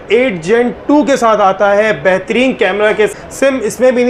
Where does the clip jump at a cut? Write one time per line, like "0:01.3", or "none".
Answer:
0:03.1